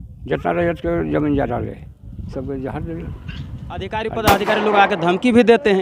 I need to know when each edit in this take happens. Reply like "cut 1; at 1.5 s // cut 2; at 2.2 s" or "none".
cut 1; at 3.9 s